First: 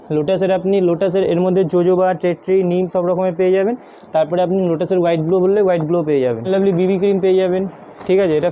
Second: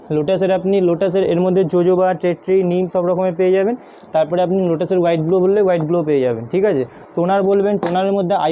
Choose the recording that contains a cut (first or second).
first